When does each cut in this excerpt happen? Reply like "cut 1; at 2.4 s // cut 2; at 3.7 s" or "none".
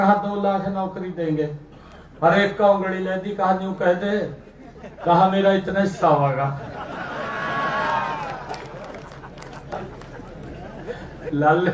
none